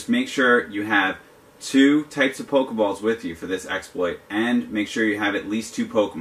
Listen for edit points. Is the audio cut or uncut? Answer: cut